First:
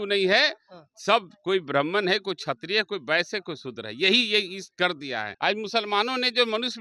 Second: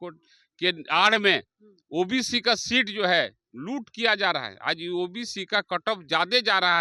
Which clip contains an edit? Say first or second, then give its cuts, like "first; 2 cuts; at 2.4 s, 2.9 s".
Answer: first; 1 cut; at 5.3 s